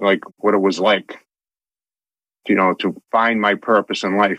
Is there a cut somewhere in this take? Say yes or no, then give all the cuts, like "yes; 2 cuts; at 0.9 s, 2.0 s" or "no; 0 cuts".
no; 0 cuts